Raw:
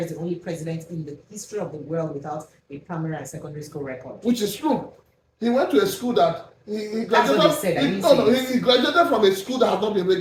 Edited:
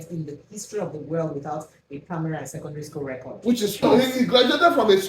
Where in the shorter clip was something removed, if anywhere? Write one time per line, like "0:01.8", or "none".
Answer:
0:03.9